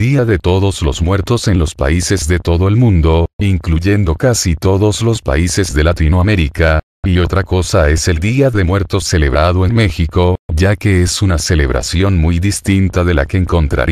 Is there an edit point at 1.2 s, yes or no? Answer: yes